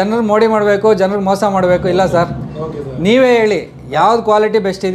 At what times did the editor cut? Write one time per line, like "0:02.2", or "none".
none